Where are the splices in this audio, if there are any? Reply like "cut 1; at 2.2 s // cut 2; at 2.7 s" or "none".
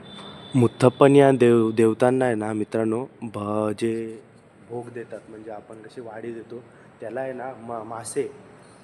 none